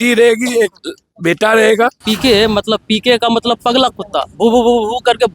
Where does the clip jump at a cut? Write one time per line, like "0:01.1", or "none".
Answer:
0:02.1